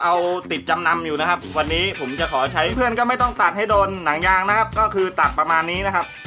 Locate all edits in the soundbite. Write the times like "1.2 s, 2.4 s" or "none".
2.7 s